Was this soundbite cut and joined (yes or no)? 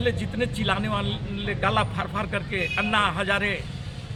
no